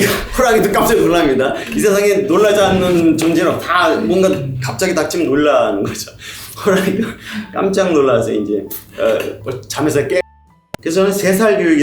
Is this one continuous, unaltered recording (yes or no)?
no